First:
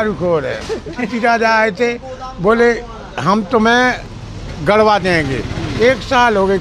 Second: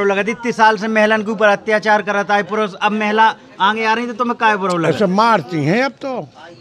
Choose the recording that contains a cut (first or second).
first